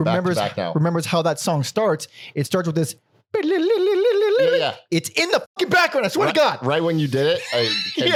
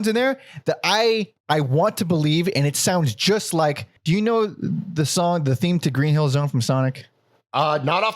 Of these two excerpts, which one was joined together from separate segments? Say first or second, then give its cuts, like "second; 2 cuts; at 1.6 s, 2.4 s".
second; 2 cuts; at 1.4 s, 3.9 s